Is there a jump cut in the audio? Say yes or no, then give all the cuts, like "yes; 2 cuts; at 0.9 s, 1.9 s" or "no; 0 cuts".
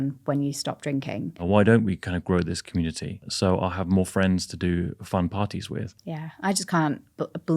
yes; 2 cuts; at 1.4 s, 5.9 s